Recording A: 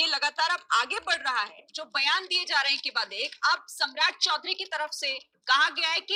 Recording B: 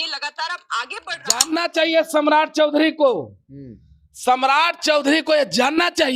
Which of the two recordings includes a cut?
B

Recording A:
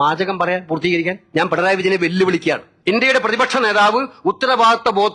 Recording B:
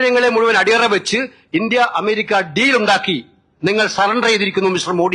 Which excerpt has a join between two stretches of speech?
A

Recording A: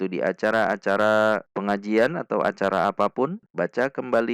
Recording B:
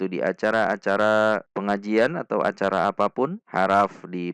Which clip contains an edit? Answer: A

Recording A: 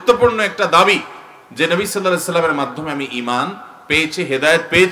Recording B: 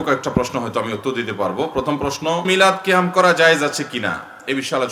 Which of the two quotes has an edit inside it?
B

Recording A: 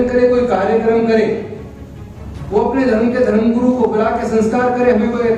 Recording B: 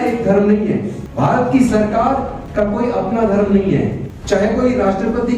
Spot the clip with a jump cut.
B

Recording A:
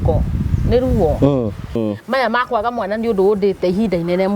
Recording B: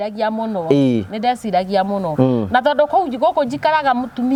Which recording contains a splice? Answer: A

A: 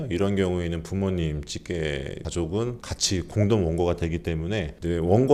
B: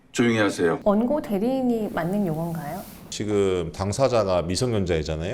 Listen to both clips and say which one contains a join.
B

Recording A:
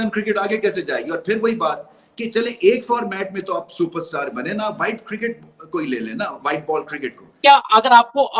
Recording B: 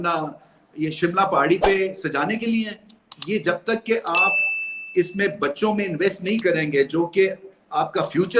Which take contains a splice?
A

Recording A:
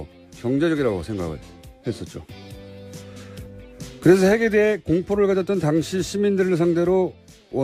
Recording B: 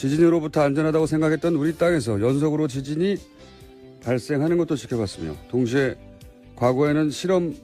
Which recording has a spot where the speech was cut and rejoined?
A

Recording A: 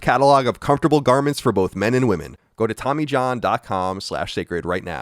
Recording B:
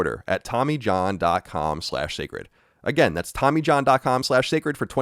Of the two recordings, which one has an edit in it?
A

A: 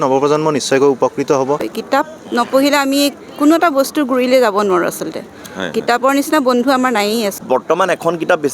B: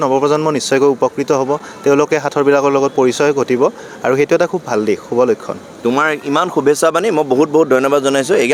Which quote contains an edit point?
A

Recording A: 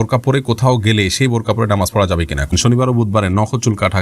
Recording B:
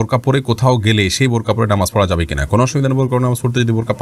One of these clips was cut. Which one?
A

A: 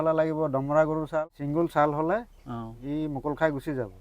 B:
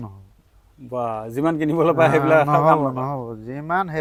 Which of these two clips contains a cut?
A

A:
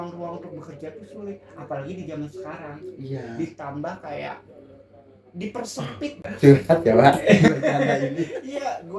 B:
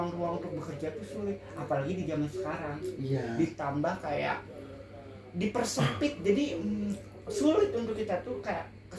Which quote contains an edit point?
A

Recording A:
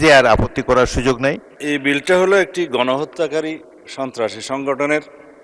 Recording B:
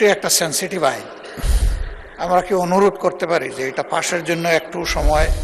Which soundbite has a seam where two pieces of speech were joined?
A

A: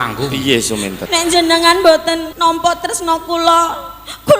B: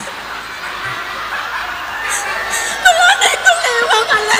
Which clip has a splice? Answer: A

